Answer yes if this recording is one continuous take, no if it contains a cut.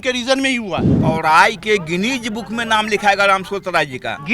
no